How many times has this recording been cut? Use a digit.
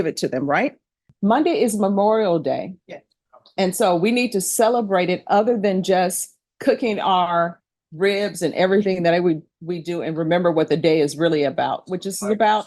1